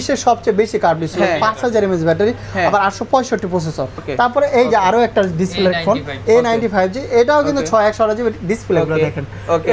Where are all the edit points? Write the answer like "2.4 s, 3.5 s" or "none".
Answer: 4.0 s